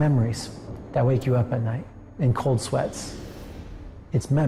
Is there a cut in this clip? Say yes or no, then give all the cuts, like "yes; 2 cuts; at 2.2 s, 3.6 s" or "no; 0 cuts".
yes; 1 cut; at 2.0 s